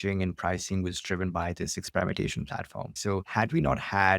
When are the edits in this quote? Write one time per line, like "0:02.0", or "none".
0:03.1